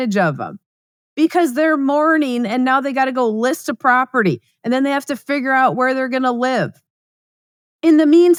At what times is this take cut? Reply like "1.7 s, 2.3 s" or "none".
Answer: none